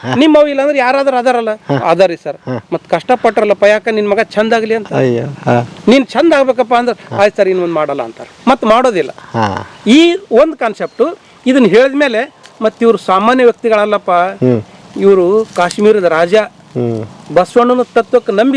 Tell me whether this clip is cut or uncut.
uncut